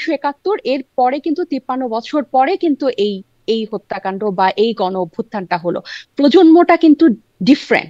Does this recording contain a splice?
no; 0 cuts

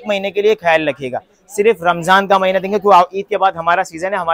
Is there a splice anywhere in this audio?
no; 0 cuts

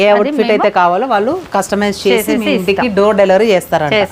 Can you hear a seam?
no; 0 cuts

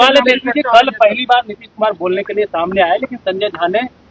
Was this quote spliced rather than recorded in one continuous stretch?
no; 0 cuts

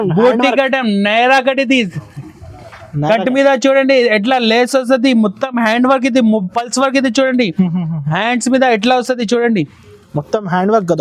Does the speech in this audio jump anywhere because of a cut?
no; 0 cuts

